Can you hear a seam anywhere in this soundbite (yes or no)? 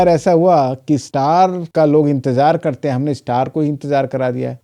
no